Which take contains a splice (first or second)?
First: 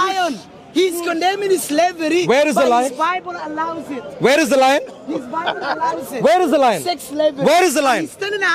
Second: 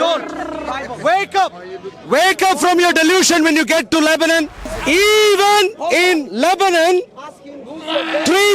second